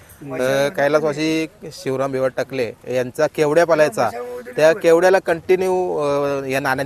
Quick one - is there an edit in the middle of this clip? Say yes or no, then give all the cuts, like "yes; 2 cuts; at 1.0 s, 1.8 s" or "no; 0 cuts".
no; 0 cuts